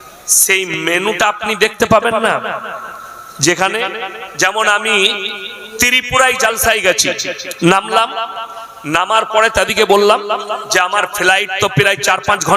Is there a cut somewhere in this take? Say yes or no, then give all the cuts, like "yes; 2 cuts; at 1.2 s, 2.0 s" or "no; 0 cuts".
no; 0 cuts